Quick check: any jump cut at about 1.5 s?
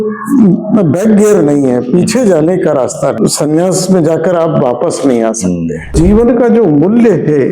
no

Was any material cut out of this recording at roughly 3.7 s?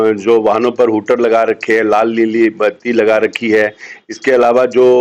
no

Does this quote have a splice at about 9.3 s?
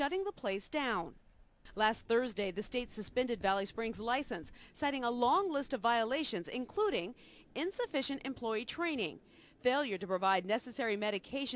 yes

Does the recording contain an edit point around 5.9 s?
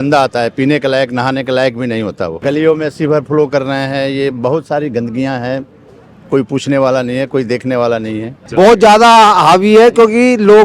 no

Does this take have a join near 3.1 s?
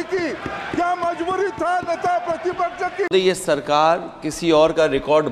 yes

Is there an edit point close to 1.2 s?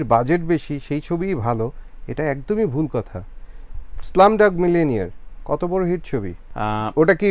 no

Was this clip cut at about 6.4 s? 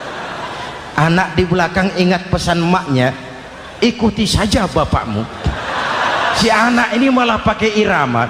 yes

